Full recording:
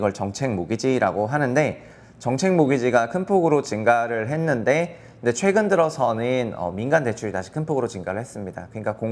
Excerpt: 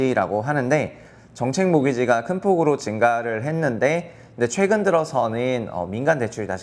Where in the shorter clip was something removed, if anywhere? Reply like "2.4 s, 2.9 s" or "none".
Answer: none